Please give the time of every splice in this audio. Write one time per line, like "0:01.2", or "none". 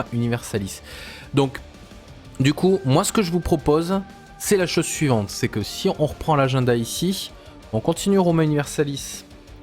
0:04.6